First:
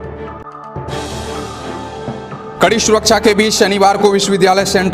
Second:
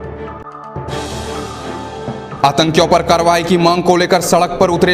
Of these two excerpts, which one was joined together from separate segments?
second; 1 cut; at 2.3 s

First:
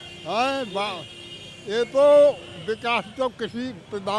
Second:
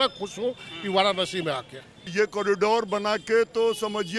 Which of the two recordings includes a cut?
second; 1 cut; at 2.1 s

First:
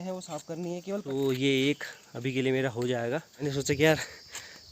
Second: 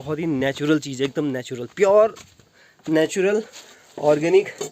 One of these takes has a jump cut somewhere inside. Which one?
first; 2 cuts; at 1.0 s, 3.5 s

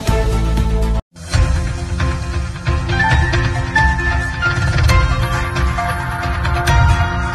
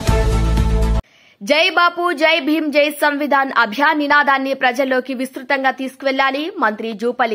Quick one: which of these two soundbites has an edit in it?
second; 1 cut; at 0.9 s

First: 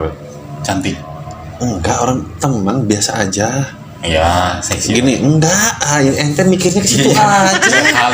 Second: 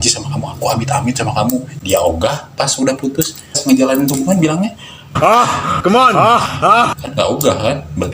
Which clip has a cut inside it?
second; 2 cuts; at 1.7 s, 3.6 s

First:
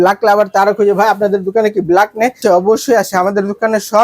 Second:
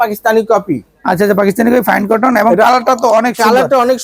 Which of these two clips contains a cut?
first; 1 cut; at 2.4 s

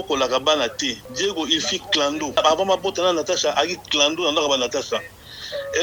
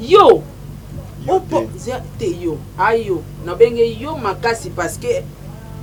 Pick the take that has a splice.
first; 2 cuts; at 1.0 s, 2.4 s

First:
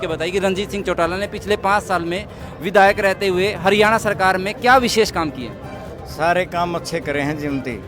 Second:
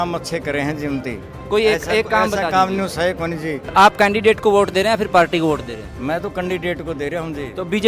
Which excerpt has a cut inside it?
second; 1 cut; at 3.7 s

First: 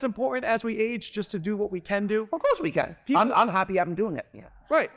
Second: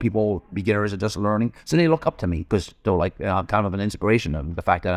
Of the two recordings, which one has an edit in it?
second; 1 cut; at 2.4 s

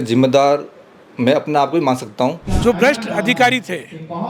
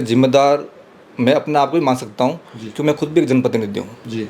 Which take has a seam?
first; 1 cut; at 2.5 s

